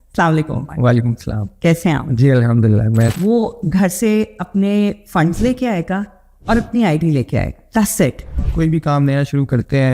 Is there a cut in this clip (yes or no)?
yes